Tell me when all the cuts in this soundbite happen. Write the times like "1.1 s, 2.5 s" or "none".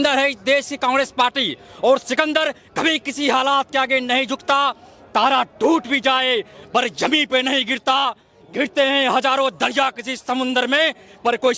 none